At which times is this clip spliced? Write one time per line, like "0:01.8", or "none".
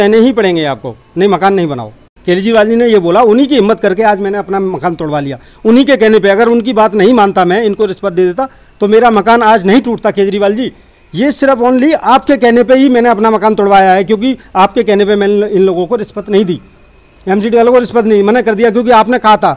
0:01.9